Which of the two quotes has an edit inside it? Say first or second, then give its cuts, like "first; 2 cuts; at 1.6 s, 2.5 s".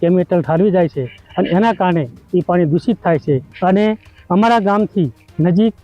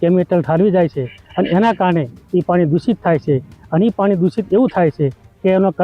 first; 1 cut; at 3.5 s